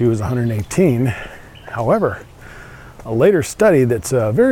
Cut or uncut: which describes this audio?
uncut